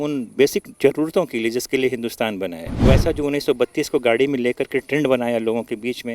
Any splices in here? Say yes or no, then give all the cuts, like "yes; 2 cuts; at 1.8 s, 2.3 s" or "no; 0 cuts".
yes; 1 cut; at 2.8 s